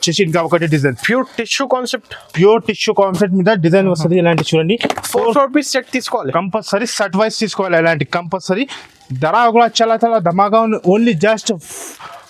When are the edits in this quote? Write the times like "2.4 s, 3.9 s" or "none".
none